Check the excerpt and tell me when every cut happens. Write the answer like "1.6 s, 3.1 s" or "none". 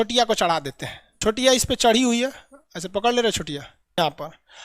none